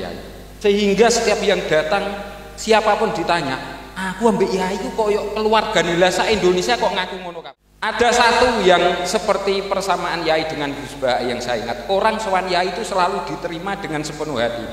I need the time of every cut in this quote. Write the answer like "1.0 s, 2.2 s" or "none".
7.2 s

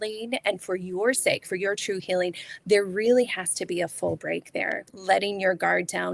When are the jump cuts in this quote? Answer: 4.9 s

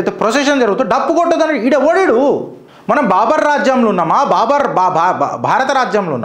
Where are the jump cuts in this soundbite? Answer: none

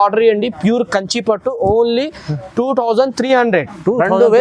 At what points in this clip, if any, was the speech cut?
none

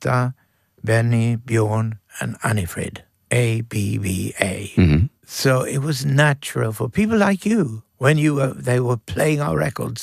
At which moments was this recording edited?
3.1 s, 5.2 s, 7.8 s

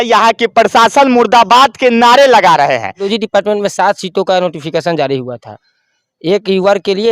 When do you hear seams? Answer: 3.0 s

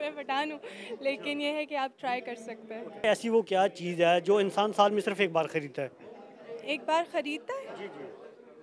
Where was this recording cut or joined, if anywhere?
3.0 s

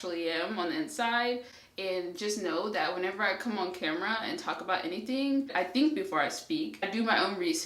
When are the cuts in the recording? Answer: 6.8 s

